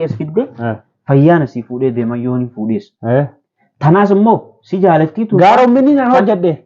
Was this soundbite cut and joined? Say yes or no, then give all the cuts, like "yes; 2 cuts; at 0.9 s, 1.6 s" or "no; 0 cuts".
no; 0 cuts